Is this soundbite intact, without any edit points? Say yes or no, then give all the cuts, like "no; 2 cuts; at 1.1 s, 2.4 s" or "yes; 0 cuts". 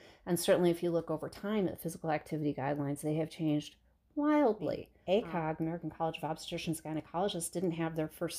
no; 1 cut; at 4.9 s